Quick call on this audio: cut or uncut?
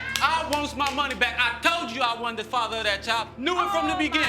cut